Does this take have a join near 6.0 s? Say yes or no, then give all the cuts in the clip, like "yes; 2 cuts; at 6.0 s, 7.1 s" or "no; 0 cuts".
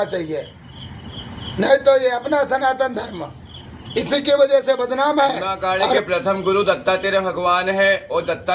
yes; 1 cut; at 6.0 s